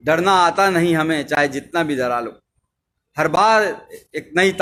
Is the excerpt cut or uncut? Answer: uncut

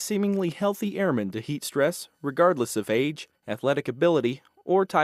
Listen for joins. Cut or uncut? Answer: cut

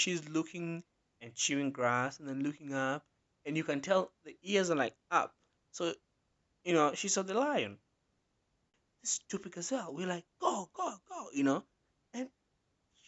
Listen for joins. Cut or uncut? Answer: cut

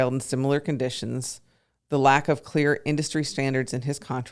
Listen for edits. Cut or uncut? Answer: uncut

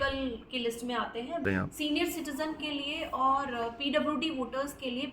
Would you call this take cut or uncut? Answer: cut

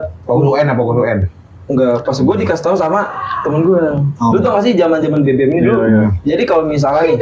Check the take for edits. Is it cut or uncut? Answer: uncut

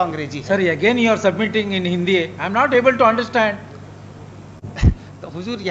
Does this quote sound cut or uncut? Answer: uncut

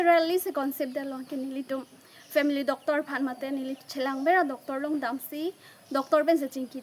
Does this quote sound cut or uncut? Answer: uncut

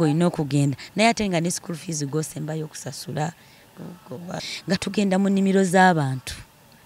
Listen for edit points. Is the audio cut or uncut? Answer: cut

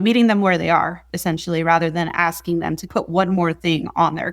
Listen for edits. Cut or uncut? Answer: cut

